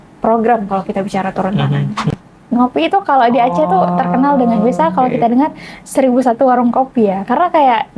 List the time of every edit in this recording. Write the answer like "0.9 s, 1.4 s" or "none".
2.3 s